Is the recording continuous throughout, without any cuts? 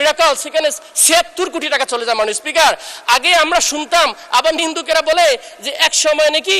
yes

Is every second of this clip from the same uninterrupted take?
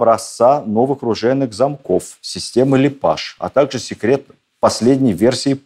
yes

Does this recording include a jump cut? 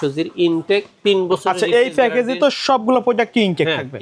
no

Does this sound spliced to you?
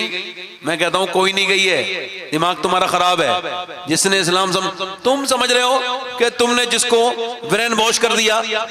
no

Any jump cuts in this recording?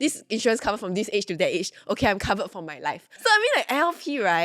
yes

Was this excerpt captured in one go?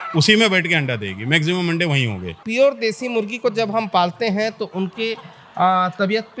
no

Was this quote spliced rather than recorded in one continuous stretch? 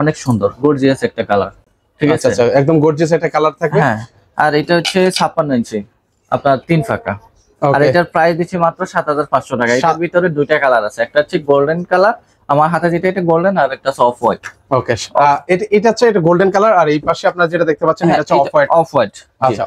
no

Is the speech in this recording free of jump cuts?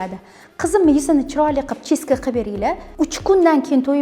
no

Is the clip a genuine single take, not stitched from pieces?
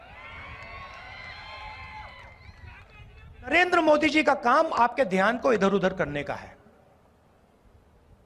no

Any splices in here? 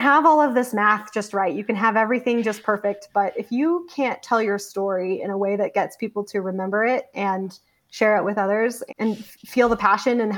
no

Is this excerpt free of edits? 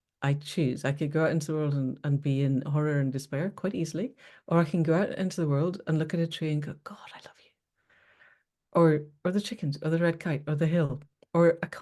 yes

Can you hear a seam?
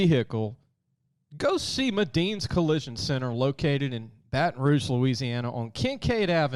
no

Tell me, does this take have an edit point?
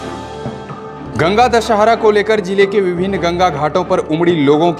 yes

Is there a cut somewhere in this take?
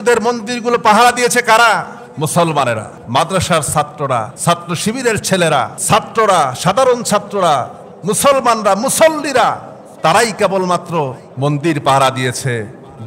yes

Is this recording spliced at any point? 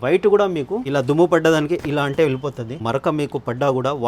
yes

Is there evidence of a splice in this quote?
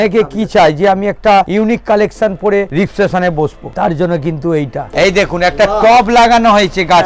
yes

